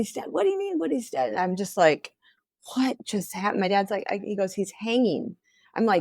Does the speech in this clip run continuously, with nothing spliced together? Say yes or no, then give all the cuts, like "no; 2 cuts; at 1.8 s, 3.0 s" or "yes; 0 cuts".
yes; 0 cuts